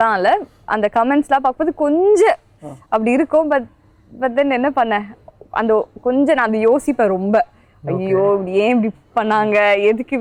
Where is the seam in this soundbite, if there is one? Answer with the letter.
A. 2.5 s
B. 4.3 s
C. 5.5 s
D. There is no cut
D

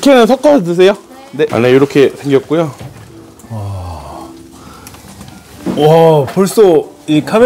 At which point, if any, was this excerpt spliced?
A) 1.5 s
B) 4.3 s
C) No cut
A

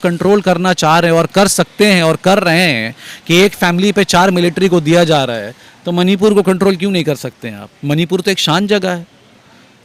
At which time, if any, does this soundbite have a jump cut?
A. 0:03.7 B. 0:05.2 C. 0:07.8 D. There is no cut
D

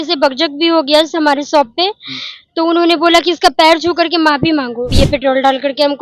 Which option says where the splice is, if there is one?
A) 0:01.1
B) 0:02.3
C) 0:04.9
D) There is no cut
C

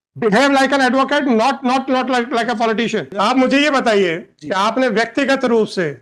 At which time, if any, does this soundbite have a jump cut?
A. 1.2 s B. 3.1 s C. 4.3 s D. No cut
B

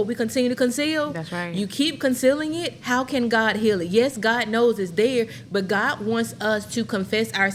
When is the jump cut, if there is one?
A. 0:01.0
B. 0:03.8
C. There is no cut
C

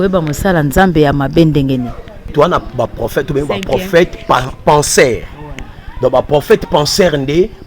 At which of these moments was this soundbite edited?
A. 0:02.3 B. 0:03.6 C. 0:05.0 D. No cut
A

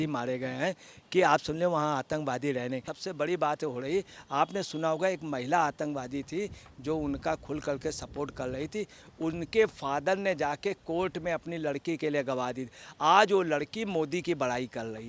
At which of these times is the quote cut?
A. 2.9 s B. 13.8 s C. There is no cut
A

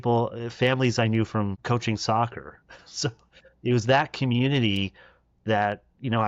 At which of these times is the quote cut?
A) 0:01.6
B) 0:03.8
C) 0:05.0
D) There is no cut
A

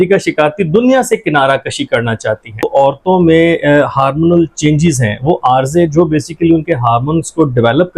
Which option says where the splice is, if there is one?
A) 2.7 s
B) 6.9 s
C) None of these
A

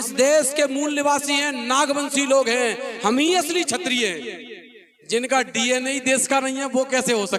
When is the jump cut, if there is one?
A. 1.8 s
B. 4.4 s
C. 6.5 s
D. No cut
D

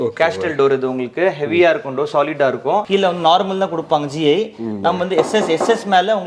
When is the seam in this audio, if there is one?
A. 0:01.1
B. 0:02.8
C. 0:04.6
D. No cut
B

